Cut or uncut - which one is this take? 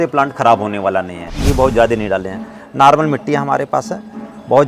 cut